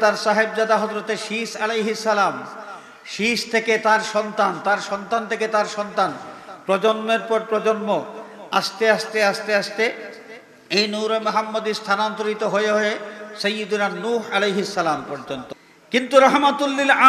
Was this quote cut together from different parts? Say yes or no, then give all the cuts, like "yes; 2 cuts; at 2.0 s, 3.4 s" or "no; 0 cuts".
yes; 1 cut; at 15.5 s